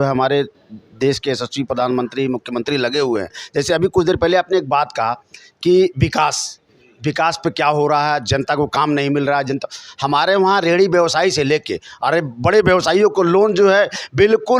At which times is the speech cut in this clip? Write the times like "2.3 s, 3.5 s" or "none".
none